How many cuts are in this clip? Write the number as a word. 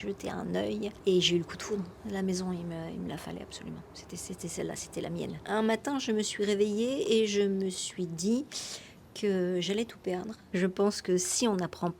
three